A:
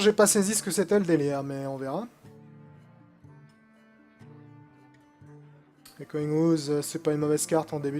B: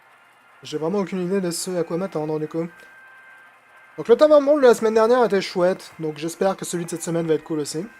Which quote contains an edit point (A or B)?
B